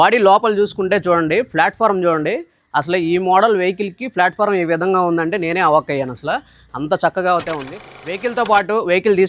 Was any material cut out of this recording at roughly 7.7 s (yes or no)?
yes